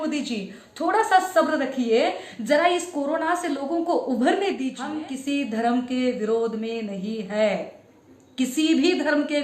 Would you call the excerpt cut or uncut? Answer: cut